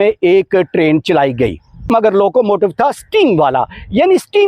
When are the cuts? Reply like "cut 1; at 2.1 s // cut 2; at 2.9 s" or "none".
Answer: cut 1; at 1.9 s